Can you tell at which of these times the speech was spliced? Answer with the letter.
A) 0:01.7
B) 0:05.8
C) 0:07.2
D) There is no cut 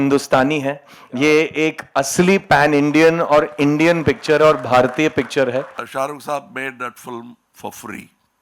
B